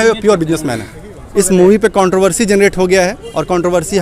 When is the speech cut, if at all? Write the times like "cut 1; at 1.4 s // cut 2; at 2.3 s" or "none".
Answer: cut 1; at 1.3 s

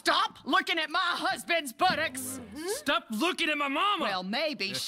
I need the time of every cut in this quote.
none

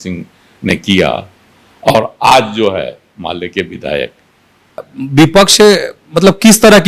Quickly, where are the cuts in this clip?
cut 1; at 4.9 s

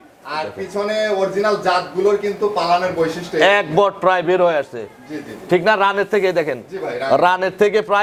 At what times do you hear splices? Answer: none

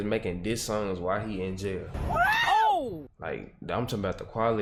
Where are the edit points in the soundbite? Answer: none

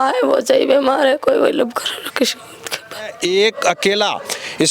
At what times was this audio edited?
cut 1; at 3.1 s

